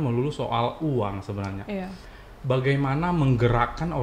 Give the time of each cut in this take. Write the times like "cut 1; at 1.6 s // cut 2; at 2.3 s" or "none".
none